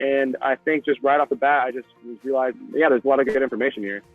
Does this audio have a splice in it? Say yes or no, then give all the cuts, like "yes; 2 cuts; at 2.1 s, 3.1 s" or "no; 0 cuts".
yes; 1 cut; at 2.6 s